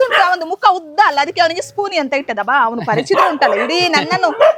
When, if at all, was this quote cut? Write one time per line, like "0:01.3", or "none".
none